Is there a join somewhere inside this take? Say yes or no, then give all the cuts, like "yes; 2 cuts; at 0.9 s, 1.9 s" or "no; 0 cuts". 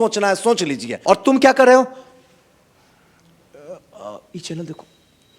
yes; 1 cut; at 1.0 s